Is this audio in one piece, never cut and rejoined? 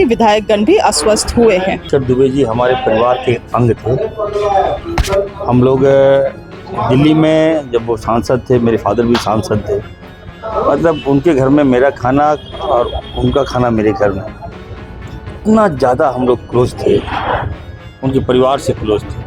no; 1 cut; at 1.8 s

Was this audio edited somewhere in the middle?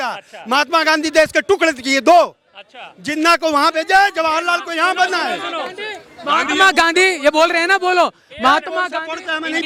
no; 0 cuts

